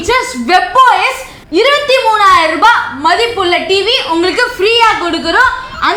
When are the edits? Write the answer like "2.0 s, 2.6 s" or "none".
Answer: none